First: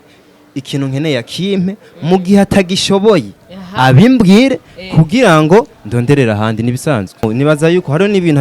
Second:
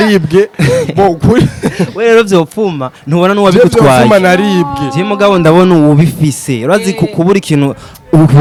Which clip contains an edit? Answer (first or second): first